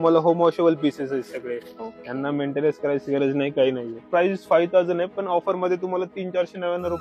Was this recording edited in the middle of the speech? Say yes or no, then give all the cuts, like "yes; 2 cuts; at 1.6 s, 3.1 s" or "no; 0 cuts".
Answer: yes; 1 cut; at 4.1 s